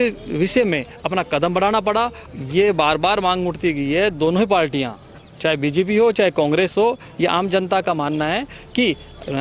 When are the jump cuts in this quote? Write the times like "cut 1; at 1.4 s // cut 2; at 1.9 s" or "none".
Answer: cut 1; at 2.2 s // cut 2; at 7.1 s